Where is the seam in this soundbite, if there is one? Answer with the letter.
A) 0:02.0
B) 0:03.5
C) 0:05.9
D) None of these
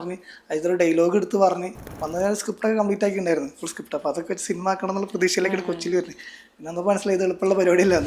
A